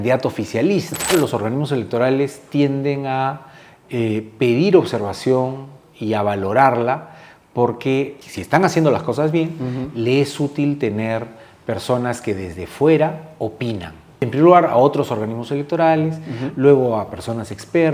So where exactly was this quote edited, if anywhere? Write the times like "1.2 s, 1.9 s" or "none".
1.1 s, 8.2 s, 14.2 s